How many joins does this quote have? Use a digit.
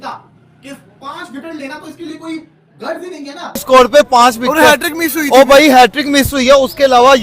1